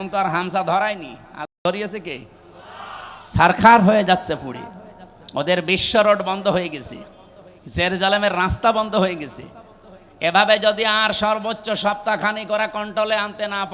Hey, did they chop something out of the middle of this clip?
no; 0 cuts

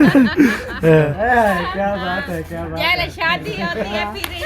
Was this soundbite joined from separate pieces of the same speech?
yes; 1 cut; at 1.1 s

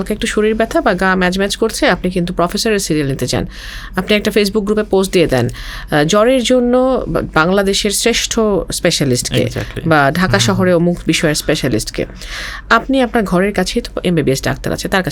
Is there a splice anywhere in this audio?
no; 0 cuts

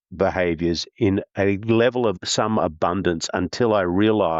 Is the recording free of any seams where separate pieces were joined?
no; 1 cut; at 2.2 s

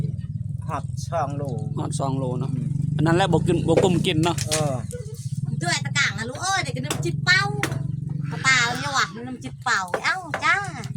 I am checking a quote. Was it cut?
no; 0 cuts

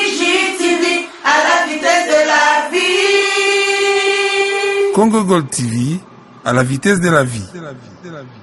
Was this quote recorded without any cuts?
yes; 0 cuts

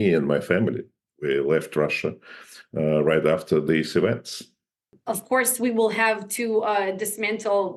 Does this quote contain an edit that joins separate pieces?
yes; 1 cut; at 4.9 s

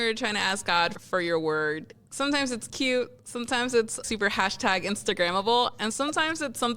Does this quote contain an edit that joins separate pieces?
yes; 1 cut; at 1.0 s

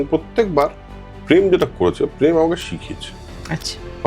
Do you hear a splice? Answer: no; 0 cuts

